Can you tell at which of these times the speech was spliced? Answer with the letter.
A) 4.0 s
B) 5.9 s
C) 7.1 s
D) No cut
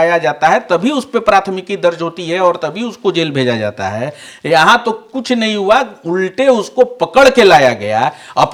D